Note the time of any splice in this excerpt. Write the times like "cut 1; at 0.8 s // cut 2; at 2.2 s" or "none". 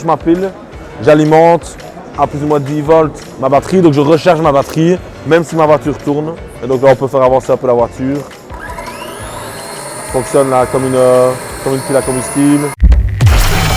cut 1; at 12.8 s